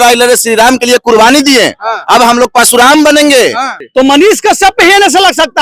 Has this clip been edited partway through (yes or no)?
yes